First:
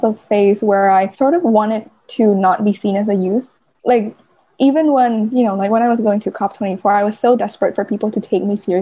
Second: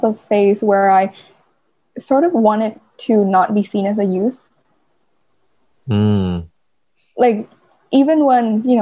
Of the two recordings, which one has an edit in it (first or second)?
first